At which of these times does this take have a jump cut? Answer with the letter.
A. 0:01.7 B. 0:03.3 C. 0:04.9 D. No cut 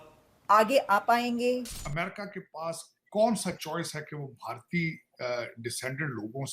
A